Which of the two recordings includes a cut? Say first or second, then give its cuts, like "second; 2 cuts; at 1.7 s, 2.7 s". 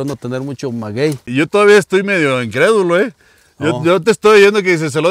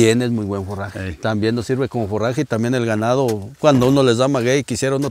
first; 1 cut; at 1.3 s